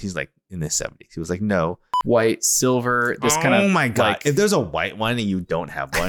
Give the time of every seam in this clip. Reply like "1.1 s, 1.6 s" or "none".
2.0 s